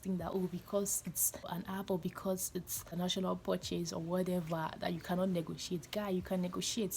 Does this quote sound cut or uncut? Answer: cut